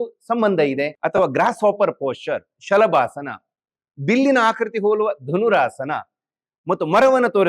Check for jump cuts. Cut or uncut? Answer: cut